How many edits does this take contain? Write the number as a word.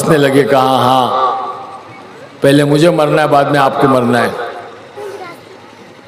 one